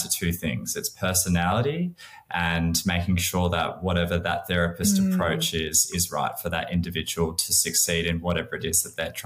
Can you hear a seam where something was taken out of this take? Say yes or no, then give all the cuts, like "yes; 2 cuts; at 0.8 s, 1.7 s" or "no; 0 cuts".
no; 0 cuts